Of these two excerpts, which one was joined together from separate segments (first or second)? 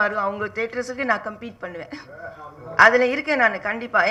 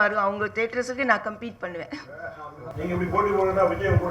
second